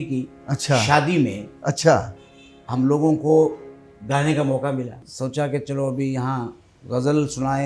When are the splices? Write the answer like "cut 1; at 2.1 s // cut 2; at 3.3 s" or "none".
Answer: cut 1; at 5.0 s